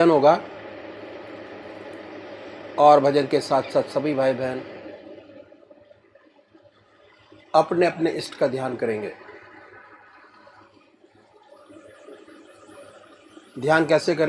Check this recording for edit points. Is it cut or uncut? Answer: uncut